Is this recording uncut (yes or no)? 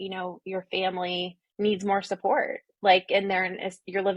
yes